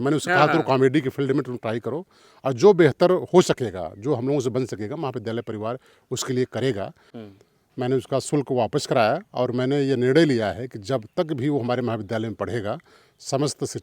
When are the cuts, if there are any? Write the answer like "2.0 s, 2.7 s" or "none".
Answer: 7.1 s